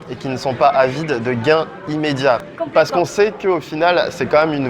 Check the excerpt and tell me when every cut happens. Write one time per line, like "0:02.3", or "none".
0:02.5